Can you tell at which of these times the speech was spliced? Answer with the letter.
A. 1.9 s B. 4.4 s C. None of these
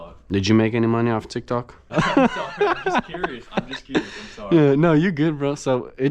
A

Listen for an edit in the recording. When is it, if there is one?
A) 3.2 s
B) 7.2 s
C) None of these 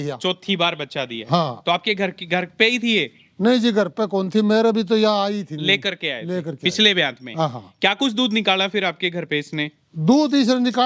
C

